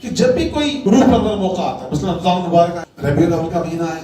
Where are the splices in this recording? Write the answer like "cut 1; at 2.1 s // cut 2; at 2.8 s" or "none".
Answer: cut 1; at 0.8 s // cut 2; at 2.9 s